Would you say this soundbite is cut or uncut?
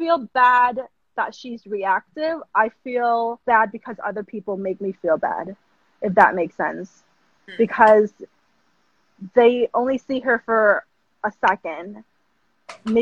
cut